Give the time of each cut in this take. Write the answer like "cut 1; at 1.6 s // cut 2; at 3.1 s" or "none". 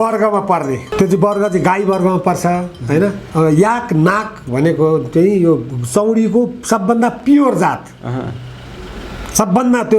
cut 1; at 0.9 s // cut 2; at 3.2 s